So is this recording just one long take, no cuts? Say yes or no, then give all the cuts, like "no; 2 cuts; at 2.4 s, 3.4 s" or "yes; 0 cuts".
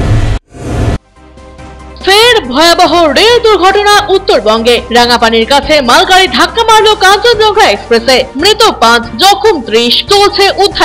yes; 0 cuts